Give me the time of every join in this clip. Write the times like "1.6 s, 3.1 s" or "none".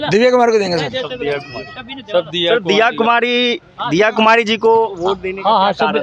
none